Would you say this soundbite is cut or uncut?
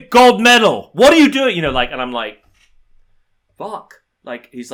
uncut